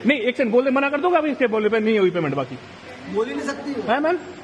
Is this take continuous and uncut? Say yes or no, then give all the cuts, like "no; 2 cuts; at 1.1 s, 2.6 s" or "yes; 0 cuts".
yes; 0 cuts